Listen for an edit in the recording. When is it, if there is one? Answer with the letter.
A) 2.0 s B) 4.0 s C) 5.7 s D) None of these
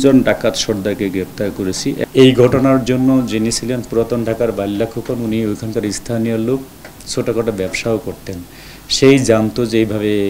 A